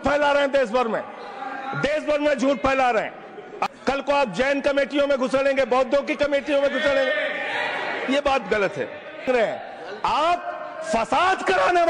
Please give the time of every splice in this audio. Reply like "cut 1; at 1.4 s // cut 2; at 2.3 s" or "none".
cut 1; at 3.6 s // cut 2; at 9.3 s